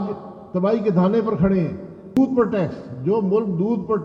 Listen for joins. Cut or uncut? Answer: cut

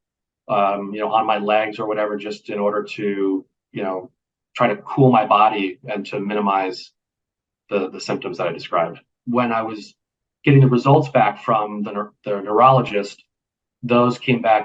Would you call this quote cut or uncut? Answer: cut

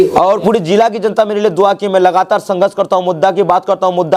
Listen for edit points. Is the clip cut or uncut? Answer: uncut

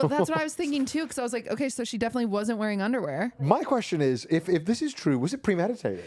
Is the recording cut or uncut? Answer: cut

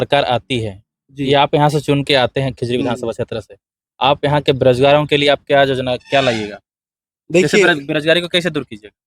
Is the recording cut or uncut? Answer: uncut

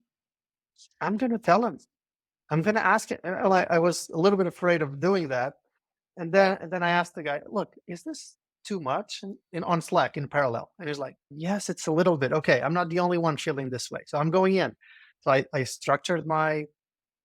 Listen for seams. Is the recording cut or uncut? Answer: uncut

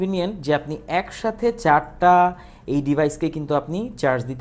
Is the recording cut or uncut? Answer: uncut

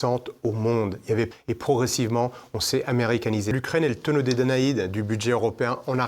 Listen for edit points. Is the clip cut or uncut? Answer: cut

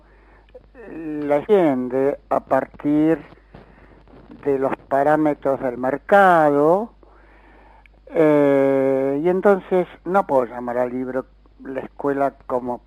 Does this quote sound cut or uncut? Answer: uncut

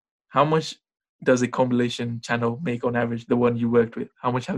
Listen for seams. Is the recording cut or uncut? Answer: uncut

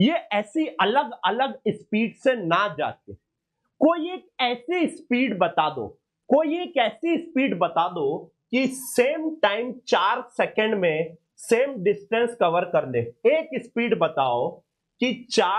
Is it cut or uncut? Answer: uncut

